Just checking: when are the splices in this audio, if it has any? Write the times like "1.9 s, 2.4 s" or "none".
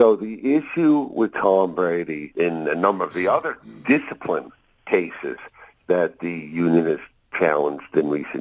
2.2 s